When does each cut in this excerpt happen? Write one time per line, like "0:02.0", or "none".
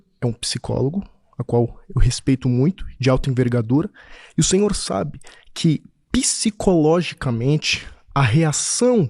none